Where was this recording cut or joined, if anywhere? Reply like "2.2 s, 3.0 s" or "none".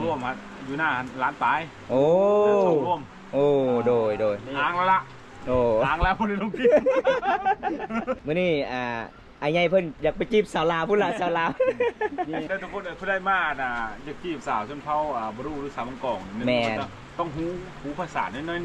8.2 s, 12.5 s